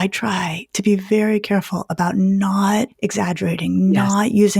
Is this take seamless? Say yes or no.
no